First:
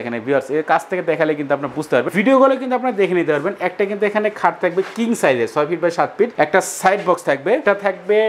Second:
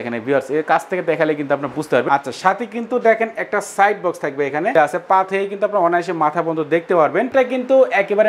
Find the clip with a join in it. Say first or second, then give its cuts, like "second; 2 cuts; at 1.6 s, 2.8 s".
second; 3 cuts; at 2.1 s, 4.7 s, 7.3 s